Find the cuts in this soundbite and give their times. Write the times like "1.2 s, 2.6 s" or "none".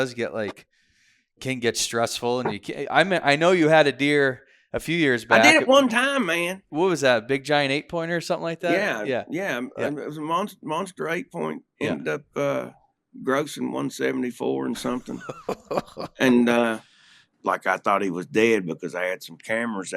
6.7 s, 17.3 s